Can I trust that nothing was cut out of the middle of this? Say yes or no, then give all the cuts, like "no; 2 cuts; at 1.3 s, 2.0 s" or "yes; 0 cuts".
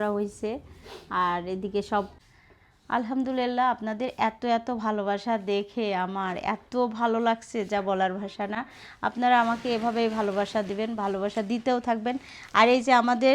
no; 1 cut; at 2.1 s